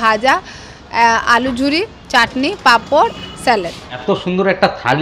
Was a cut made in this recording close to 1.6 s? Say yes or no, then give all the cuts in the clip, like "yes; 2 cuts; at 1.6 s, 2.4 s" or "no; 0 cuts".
no; 1 cut; at 3.8 s